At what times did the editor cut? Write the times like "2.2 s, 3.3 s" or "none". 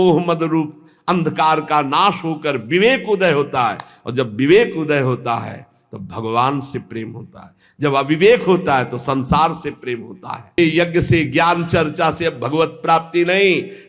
10.6 s